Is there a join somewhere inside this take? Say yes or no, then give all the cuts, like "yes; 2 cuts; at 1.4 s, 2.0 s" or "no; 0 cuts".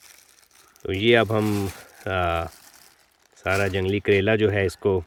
no; 0 cuts